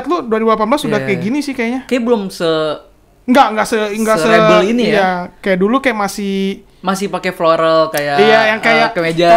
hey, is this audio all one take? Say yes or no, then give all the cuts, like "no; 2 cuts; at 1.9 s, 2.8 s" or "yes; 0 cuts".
yes; 0 cuts